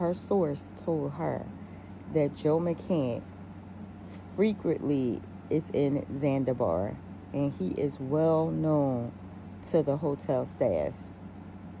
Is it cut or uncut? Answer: uncut